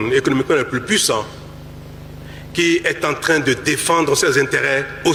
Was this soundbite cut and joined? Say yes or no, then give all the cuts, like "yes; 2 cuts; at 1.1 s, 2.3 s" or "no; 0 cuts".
no; 0 cuts